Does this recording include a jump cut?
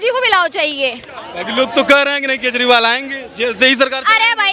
no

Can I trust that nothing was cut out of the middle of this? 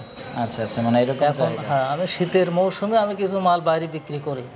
yes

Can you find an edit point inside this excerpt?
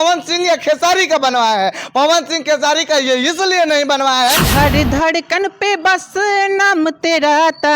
yes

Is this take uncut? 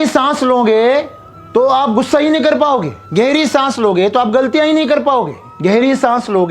no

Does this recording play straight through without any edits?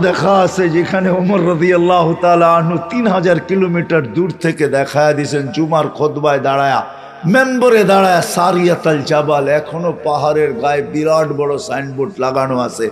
yes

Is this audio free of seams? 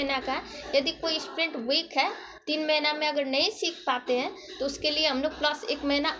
yes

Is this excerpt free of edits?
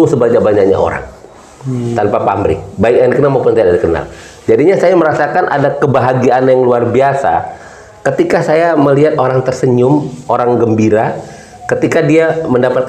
yes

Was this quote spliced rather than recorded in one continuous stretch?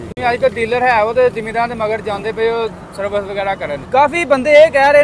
yes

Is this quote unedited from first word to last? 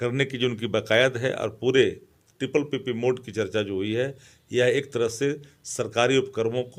yes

